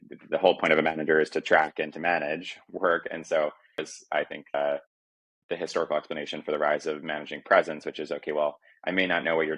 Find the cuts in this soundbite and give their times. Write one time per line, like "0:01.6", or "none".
0:04.0

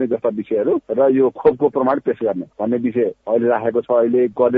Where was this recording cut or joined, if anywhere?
0:00.9
0:03.0

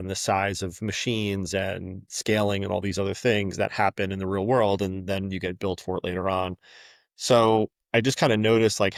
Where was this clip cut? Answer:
none

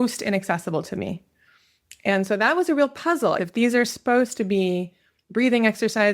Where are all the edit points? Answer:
0:03.4

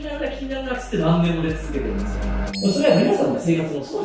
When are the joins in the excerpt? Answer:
none

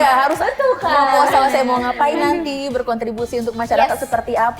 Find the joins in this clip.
none

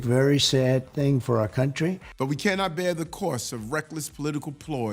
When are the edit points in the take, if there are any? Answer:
0:02.1

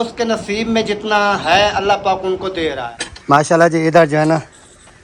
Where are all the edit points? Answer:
0:02.8

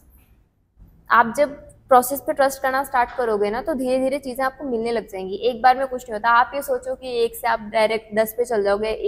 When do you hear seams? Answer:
none

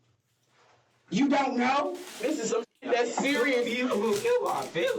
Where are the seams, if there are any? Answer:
0:02.2

